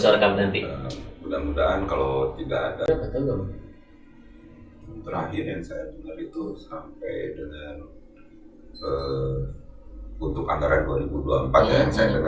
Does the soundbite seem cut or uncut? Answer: cut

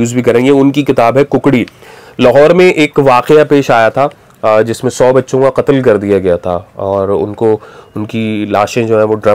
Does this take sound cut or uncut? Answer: uncut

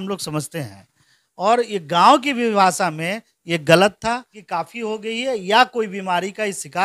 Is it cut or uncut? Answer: cut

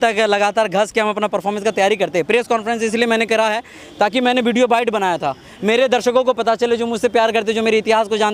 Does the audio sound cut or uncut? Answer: uncut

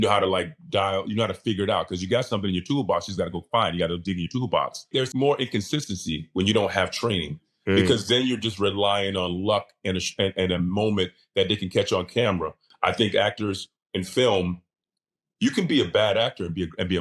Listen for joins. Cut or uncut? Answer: cut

